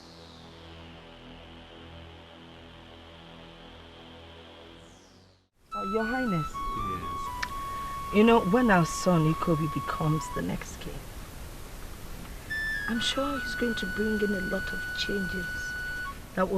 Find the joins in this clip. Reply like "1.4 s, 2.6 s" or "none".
5.5 s